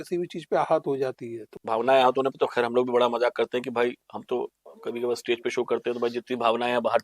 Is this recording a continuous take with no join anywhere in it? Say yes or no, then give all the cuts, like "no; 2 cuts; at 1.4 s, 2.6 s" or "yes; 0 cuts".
no; 1 cut; at 1.4 s